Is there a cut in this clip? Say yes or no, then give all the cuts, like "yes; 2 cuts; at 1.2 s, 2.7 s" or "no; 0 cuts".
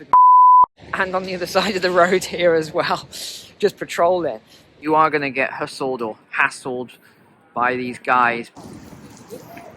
yes; 2 cuts; at 4.8 s, 8.6 s